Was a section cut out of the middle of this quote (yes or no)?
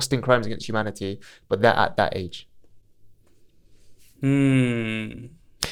no